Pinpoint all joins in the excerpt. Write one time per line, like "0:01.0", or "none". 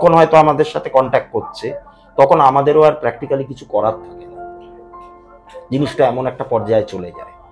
none